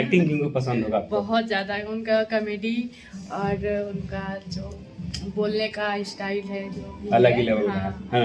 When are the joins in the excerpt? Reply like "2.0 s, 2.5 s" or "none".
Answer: none